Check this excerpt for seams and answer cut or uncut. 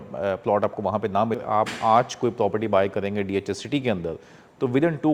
cut